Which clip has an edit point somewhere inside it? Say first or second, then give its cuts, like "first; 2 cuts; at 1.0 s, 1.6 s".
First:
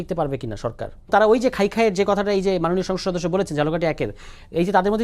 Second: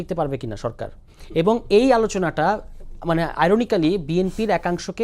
first; 1 cut; at 1.1 s